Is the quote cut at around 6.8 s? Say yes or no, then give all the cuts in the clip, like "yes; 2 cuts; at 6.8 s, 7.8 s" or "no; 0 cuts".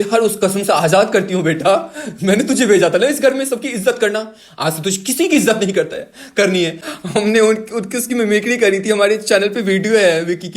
yes; 1 cut; at 6.8 s